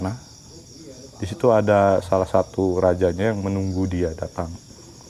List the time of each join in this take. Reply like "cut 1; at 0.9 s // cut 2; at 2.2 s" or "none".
none